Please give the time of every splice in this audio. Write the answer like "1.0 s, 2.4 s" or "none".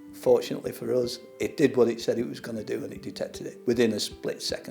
3.5 s